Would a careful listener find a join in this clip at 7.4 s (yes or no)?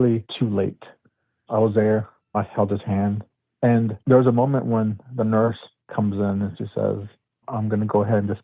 yes